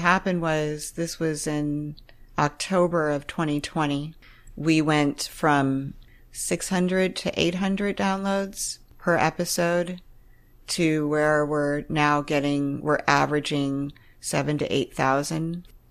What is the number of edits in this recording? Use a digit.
2